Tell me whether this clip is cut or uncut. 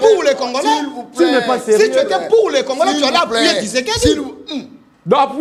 uncut